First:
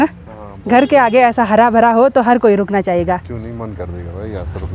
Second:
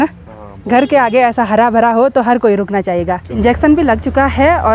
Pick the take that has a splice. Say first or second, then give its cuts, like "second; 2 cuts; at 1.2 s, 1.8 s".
second; 1 cut; at 3.3 s